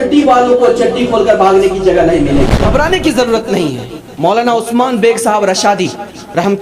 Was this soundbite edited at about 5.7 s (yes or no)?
no